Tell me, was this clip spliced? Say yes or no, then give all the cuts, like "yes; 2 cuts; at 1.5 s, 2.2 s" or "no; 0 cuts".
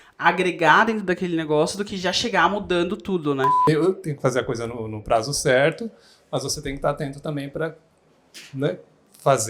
yes; 1 cut; at 3.6 s